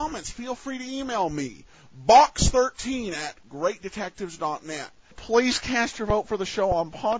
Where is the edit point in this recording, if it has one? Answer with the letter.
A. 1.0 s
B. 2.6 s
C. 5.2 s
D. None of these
C